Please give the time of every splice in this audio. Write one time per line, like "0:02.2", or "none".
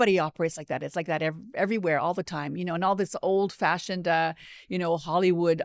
none